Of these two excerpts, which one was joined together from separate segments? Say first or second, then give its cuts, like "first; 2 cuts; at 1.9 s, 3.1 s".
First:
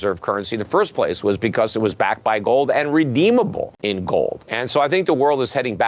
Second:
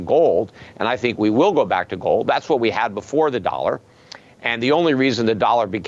first; 2 cuts; at 3.7 s, 4.4 s